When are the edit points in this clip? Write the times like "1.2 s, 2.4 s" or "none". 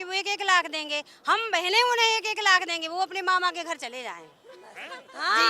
none